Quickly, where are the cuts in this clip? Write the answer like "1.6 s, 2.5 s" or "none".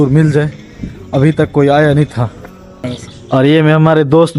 2.9 s